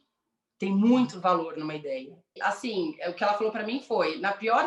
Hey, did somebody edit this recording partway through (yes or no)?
yes